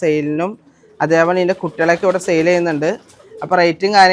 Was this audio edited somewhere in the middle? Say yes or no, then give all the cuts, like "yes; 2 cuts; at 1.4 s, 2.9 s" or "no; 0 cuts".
no; 0 cuts